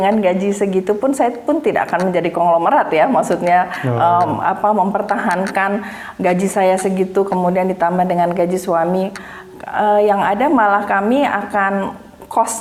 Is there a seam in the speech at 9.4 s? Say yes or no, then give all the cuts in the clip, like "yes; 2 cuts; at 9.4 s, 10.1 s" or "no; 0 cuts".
no; 0 cuts